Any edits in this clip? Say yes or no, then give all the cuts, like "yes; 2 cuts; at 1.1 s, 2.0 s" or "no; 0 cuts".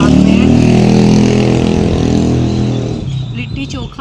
no; 0 cuts